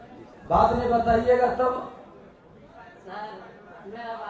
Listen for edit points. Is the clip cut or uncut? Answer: uncut